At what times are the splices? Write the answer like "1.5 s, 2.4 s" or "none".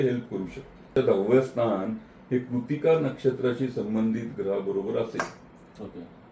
1.0 s